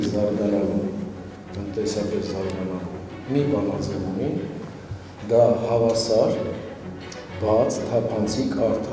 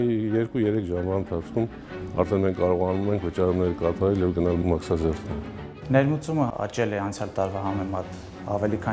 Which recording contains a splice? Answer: second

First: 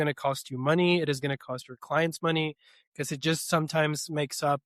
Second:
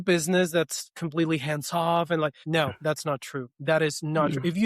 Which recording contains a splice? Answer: second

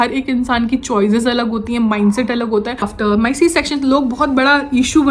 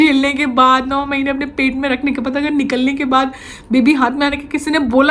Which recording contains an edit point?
first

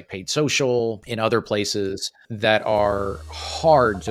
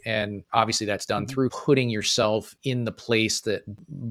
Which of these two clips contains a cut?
second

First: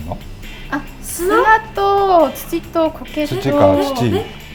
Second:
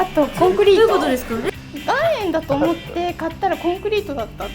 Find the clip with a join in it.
second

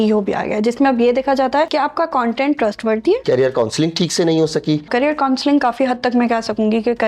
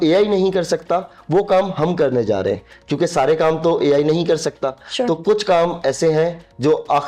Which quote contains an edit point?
first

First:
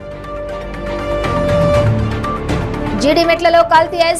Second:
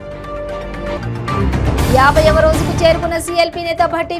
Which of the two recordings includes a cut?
first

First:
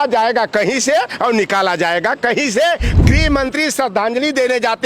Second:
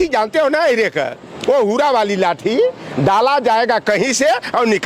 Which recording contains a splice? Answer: first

